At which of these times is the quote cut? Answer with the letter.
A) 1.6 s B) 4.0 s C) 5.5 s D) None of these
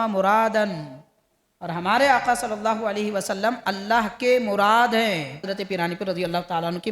C